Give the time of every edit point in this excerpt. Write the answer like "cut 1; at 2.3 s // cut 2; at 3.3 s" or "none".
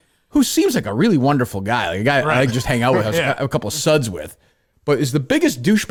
none

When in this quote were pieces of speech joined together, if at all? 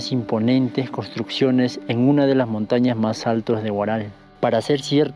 cut 1; at 4.2 s

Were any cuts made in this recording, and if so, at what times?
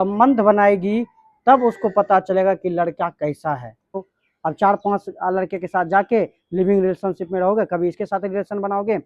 cut 1; at 4.1 s

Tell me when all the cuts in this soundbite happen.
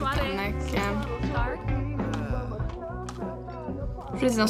none

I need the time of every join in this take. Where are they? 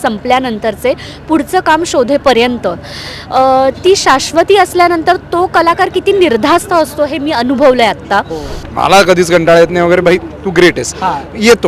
cut 1; at 8.6 s

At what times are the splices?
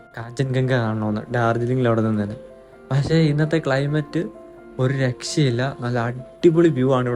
none

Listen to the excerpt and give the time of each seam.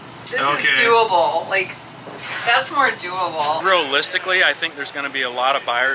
cut 1; at 3.6 s

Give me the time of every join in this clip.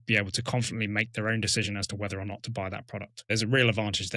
cut 1; at 3.3 s

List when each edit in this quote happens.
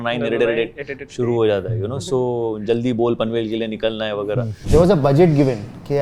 cut 1; at 4.6 s

